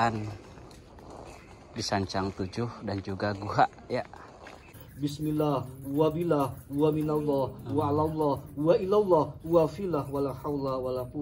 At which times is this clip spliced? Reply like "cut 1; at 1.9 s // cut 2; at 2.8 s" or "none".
cut 1; at 4.8 s